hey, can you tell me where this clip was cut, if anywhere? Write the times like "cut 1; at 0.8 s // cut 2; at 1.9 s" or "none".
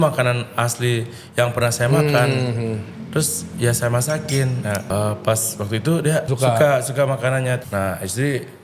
cut 1; at 4.9 s // cut 2; at 6.3 s // cut 3; at 7.6 s